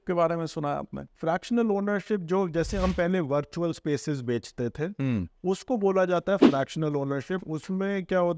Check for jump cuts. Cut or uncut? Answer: cut